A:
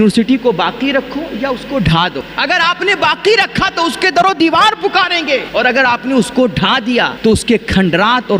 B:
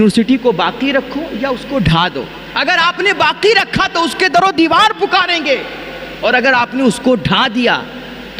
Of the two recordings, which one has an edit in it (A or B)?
A